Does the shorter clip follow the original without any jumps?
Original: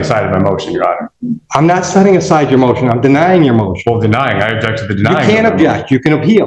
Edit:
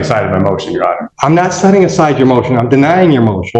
no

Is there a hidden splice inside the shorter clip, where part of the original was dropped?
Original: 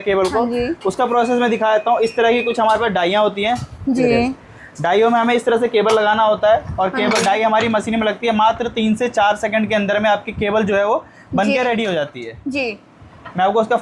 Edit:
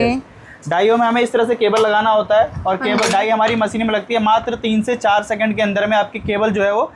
no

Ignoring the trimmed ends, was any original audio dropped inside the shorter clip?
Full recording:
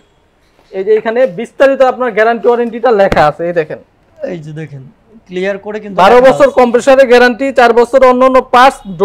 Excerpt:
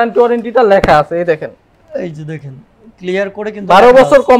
no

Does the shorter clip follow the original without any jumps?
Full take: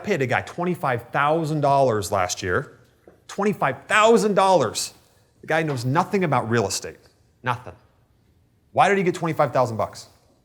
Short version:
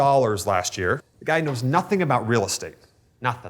no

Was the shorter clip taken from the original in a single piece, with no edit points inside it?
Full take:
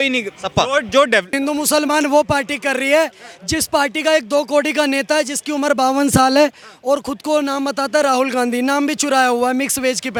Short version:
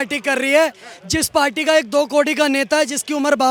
yes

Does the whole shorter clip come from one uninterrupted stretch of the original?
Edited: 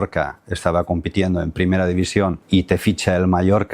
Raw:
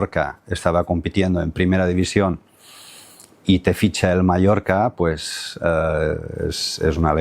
no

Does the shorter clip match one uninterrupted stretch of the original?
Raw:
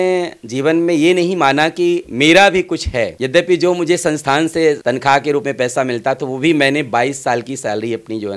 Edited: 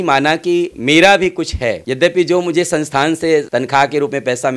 yes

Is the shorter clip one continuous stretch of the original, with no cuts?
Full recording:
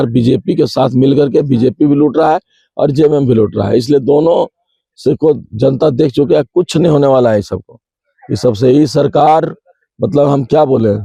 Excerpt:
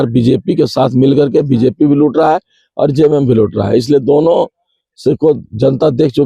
yes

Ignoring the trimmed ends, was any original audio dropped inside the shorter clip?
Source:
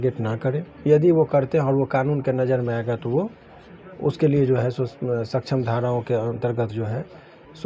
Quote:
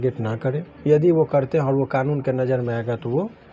no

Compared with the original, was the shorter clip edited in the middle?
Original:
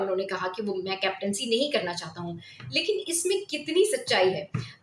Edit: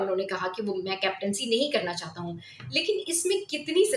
no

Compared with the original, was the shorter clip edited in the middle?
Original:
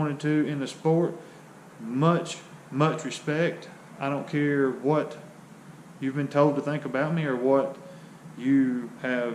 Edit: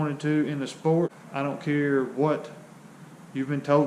yes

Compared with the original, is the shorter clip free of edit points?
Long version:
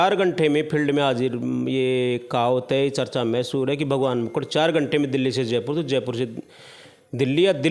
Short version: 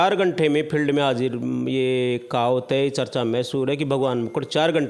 yes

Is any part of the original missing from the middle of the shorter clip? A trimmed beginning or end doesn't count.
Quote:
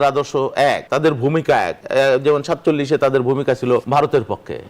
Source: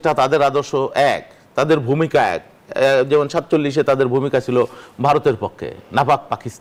yes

